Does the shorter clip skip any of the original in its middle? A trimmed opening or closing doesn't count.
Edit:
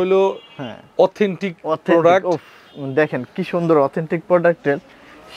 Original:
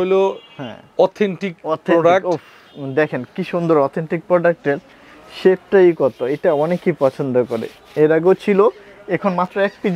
no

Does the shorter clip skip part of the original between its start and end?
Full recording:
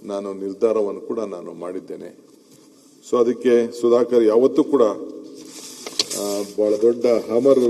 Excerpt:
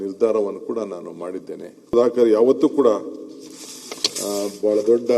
yes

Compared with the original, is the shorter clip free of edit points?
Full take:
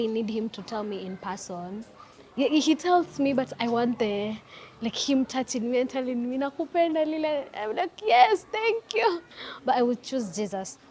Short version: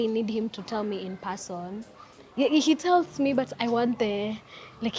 yes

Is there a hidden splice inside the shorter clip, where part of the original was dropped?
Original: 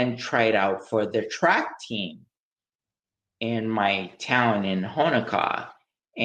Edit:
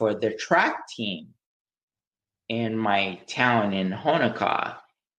no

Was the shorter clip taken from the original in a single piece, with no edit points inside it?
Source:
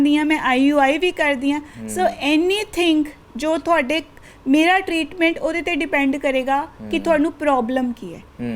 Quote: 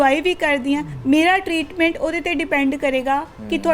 no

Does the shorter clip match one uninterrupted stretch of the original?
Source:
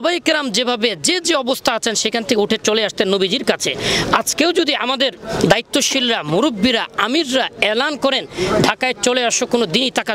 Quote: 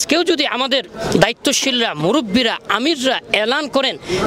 yes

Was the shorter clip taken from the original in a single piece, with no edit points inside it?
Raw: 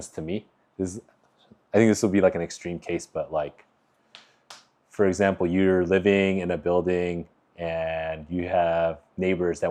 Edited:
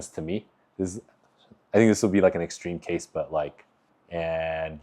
no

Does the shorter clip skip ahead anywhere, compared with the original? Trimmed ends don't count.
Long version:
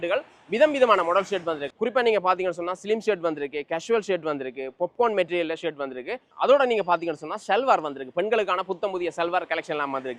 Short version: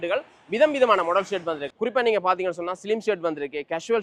no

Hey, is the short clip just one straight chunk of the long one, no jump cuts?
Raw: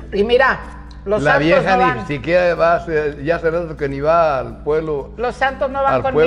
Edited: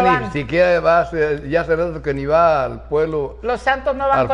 yes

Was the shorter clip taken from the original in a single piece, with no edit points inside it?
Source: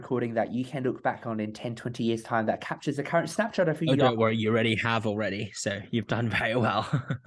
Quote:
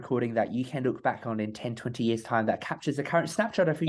yes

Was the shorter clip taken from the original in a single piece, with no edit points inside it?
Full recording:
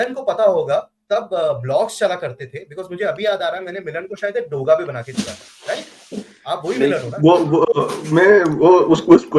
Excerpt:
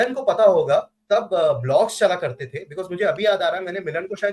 yes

